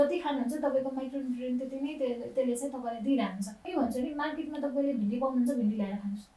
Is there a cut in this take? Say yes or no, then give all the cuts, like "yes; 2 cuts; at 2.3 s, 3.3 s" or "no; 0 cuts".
yes; 1 cut; at 3.7 s